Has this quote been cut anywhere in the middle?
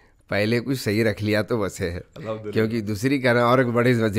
no; 0 cuts

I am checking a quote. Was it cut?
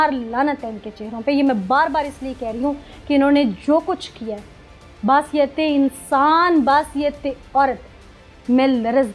no; 0 cuts

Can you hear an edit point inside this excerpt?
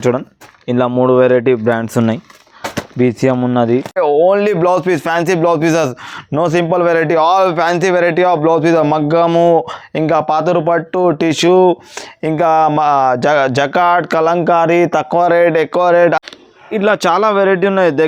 yes; 2 cuts; at 4.0 s, 16.1 s

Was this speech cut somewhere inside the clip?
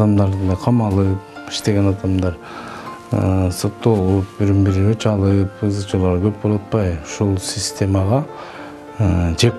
no; 0 cuts

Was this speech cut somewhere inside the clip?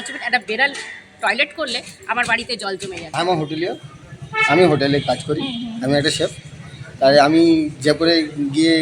yes; 1 cut; at 3.0 s

